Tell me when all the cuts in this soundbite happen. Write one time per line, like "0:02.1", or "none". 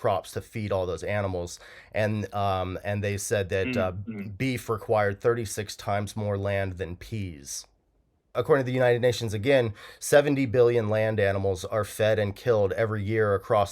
0:08.3